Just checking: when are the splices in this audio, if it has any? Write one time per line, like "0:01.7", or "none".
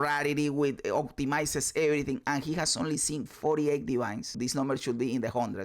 0:04.3